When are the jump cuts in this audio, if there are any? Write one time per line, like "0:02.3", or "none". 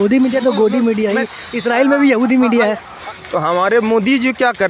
0:03.0